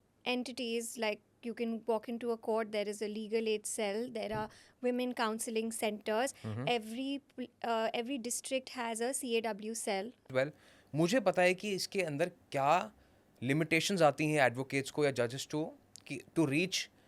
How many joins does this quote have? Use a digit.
1